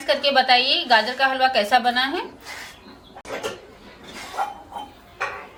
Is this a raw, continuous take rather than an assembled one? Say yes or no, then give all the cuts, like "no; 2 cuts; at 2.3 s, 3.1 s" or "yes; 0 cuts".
yes; 0 cuts